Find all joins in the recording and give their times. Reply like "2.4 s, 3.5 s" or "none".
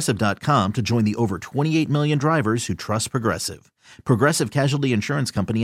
none

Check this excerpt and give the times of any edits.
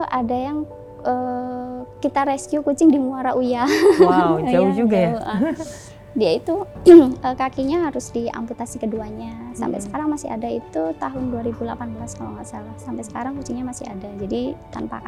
none

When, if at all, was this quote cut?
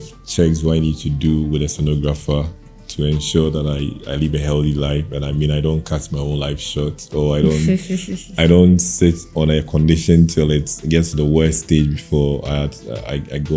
none

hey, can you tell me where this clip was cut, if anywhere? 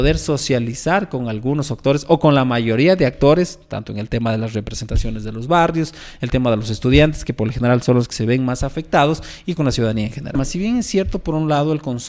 10.4 s

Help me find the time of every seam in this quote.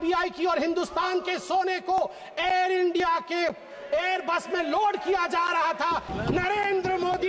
6.1 s

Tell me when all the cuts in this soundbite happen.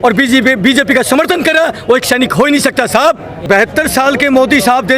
3.4 s

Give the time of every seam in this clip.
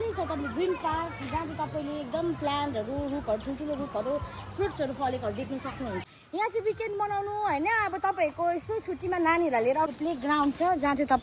6.1 s, 9.9 s

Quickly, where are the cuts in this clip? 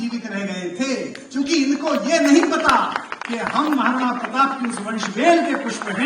none

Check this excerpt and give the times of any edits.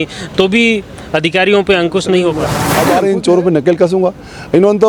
2.8 s

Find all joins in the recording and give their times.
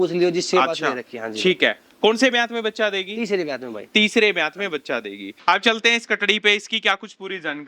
5.3 s

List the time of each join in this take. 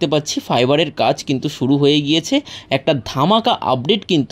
none

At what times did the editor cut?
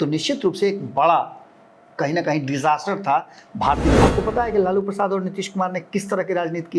4.0 s

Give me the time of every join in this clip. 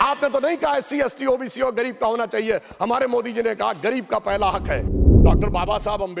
4.8 s

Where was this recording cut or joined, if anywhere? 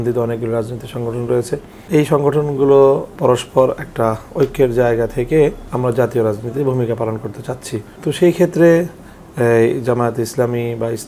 1.7 s, 3.1 s, 5.7 s, 7.9 s

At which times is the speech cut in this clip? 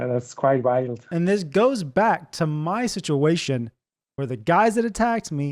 1.1 s

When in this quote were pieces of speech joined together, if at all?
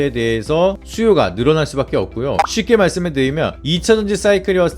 2.5 s

